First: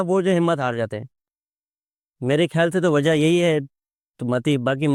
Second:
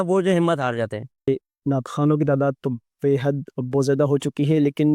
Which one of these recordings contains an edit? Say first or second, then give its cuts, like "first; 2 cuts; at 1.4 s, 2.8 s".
second; 1 cut; at 1.3 s